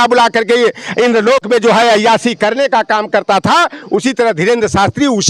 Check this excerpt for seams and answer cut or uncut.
uncut